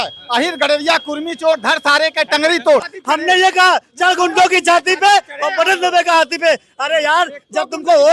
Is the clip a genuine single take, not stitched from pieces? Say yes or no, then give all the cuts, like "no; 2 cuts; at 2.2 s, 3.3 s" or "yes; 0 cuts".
no; 1 cut; at 2.9 s